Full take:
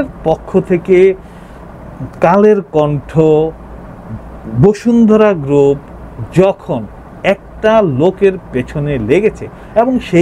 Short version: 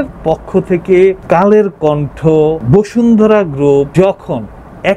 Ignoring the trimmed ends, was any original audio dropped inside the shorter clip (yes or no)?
yes